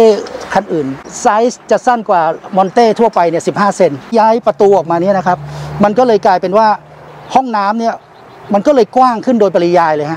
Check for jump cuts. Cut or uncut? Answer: cut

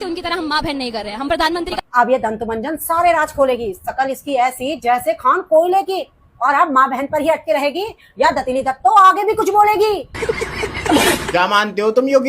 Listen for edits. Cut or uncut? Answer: cut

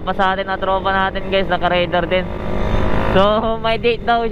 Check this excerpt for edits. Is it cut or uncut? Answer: cut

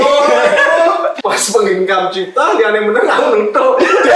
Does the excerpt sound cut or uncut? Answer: cut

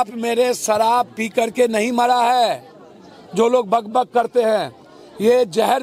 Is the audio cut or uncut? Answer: uncut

